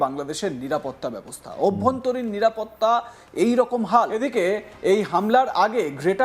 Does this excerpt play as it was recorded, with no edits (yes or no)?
no